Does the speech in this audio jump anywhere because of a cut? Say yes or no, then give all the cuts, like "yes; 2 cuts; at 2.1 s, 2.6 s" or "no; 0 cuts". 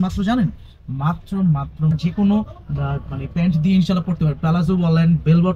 yes; 1 cut; at 1.9 s